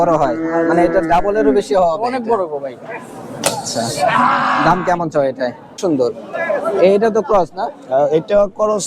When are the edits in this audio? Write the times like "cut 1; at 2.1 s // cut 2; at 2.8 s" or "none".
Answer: cut 1; at 5.7 s